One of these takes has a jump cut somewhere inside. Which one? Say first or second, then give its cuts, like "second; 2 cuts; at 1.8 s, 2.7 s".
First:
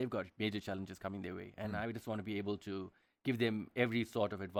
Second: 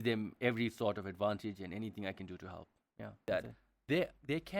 second; 1 cut; at 3.2 s